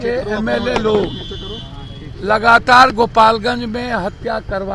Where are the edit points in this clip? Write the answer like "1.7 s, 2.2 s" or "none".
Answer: none